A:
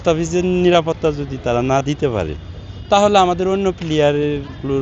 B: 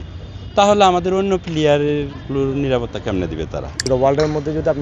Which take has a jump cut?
B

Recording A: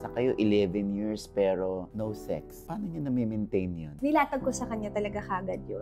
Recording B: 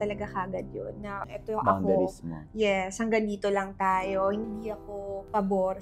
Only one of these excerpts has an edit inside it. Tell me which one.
A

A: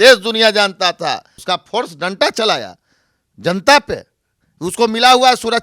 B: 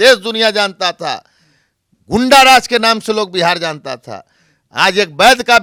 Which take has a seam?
A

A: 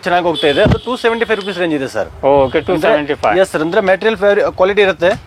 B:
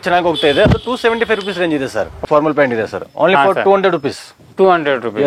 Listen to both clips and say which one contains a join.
B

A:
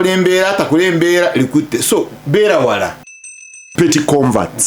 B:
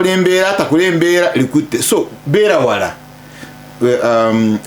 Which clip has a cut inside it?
A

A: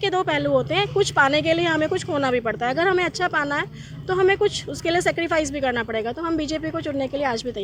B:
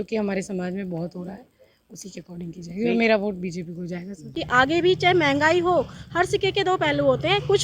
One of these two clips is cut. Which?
B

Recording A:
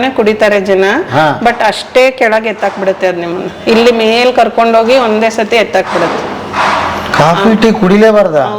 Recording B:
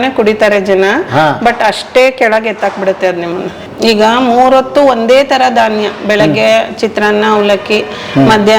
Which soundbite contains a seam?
B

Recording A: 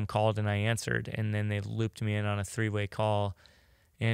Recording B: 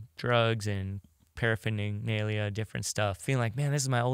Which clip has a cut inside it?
B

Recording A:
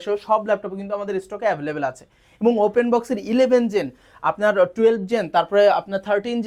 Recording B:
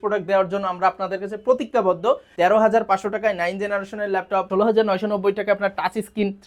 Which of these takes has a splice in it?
B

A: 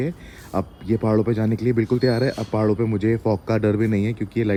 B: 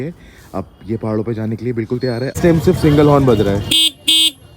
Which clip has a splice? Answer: B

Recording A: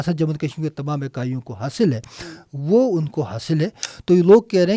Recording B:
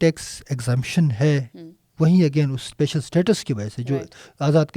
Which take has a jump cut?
A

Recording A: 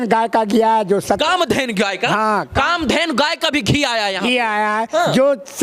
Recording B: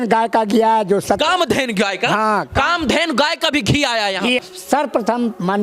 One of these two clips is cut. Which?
B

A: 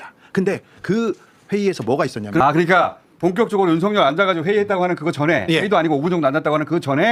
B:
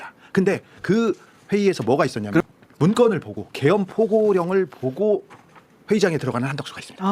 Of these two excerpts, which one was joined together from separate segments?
B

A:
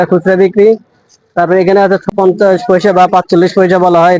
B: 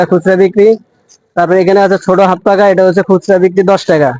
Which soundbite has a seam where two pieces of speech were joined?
A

